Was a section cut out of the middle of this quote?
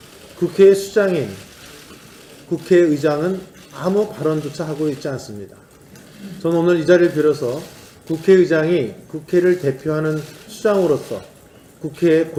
no; 0 cuts

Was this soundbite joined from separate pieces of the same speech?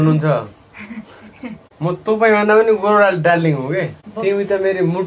yes; 2 cuts; at 1.6 s, 4.0 s

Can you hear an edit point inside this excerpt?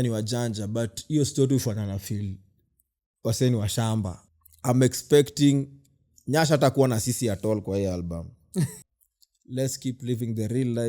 yes; 2 cuts; at 4.2 s, 8.8 s

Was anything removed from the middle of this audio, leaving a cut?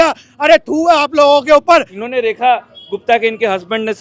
yes; 1 cut; at 2.0 s

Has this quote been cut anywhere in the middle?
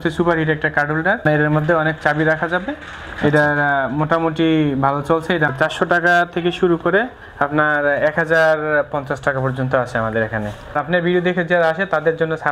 yes; 3 cuts; at 1.2 s, 5.5 s, 10.7 s

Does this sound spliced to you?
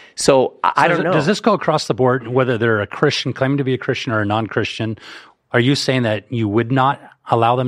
no; 0 cuts

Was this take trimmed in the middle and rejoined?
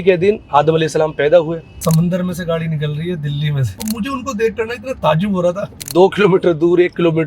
yes; 3 cuts; at 1.6 s, 3.7 s, 5.7 s

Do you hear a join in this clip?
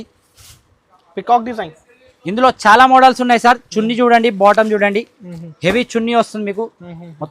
no; 0 cuts

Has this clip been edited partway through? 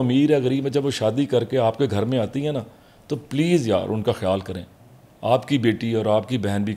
no; 0 cuts

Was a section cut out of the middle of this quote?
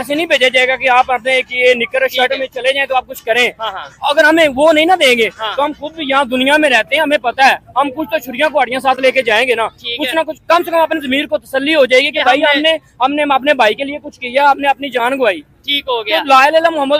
no; 0 cuts

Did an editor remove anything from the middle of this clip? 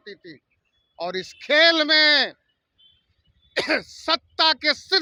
no; 0 cuts

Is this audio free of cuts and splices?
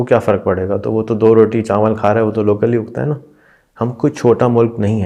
yes; 0 cuts

